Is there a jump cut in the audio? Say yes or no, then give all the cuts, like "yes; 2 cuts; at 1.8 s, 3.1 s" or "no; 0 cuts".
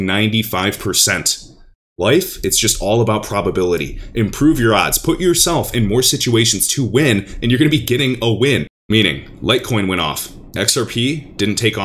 yes; 1 cut; at 8.7 s